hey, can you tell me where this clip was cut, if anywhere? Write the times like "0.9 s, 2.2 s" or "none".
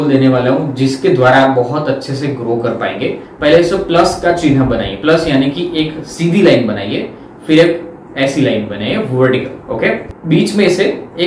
3.2 s, 10.1 s